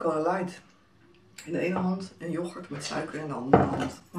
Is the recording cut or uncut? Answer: uncut